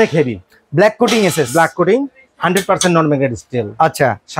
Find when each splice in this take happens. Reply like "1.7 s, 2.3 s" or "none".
none